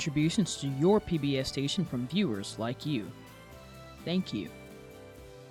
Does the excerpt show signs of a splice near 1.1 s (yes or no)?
no